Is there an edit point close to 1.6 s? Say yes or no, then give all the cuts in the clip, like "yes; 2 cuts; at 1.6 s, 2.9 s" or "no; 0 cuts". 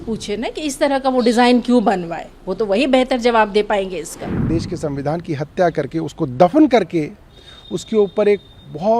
no; 1 cut; at 4.4 s